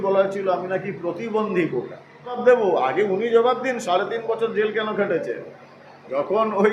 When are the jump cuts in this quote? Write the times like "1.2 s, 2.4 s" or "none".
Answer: 2.3 s